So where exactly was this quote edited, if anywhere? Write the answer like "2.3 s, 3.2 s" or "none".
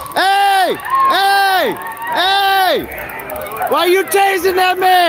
none